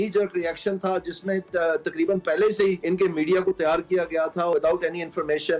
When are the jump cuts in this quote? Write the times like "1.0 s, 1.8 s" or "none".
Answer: 2.8 s, 4.5 s